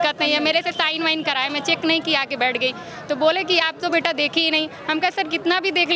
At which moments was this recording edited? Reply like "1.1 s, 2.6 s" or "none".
none